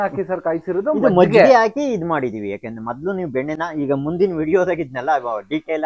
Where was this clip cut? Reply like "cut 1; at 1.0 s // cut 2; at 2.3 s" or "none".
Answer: none